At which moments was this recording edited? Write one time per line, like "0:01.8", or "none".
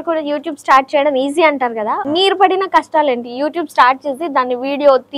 0:02.0